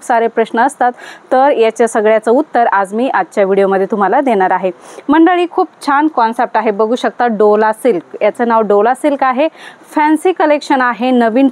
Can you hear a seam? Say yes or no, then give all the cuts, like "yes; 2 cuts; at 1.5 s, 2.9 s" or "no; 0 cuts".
no; 0 cuts